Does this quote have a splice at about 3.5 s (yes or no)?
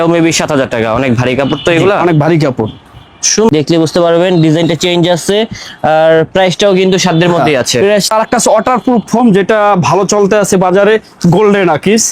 yes